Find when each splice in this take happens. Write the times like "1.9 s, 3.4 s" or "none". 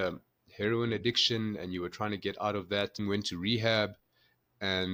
3.0 s